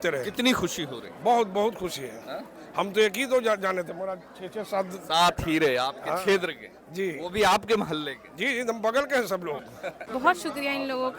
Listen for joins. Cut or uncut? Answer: cut